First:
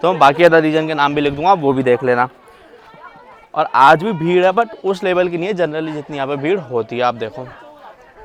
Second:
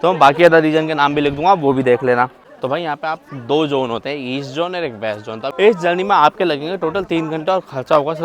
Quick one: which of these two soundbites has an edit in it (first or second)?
second